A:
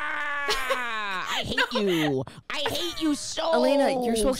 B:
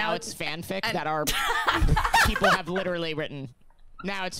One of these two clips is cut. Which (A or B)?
A